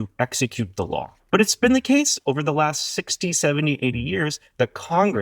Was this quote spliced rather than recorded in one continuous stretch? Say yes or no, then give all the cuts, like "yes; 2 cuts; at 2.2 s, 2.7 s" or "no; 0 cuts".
yes; 1 cut; at 1.2 s